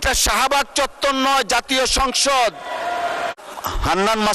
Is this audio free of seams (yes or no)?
no